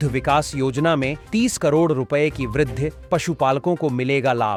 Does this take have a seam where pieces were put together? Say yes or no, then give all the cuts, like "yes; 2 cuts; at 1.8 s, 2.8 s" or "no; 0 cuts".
no; 0 cuts